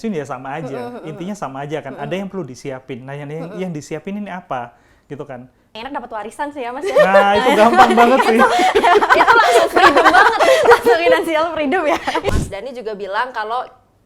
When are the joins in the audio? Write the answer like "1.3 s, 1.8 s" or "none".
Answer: 5.8 s, 12.3 s